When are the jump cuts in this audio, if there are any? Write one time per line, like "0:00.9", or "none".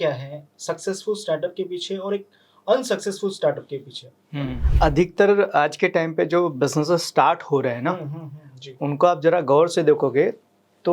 0:04.6

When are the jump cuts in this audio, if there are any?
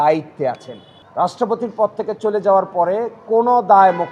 0:00.9

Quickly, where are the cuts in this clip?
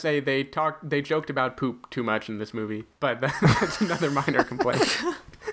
0:02.9

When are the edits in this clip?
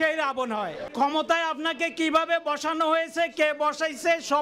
0:00.9

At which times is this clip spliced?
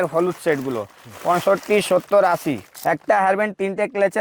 0:02.7

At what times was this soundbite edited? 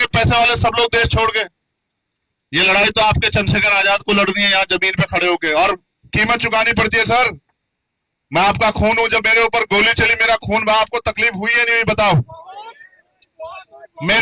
none

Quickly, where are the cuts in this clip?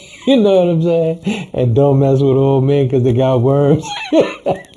none

